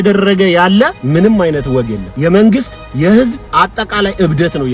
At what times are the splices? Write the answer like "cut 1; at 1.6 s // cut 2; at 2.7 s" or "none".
cut 1; at 1.0 s // cut 2; at 2.0 s // cut 3; at 3.4 s